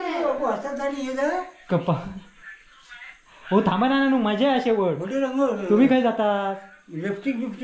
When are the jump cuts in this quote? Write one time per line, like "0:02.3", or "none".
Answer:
none